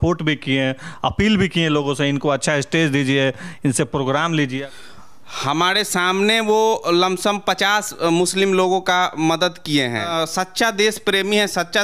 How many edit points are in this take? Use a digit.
2